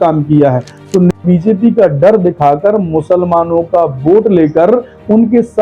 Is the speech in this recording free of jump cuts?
no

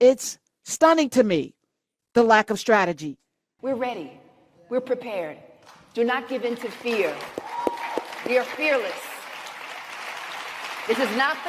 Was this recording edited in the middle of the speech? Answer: yes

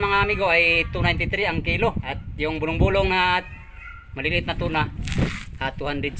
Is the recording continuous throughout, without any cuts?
no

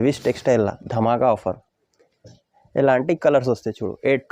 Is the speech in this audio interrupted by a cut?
no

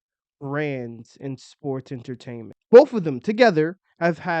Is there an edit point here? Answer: yes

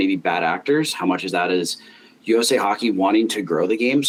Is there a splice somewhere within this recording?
no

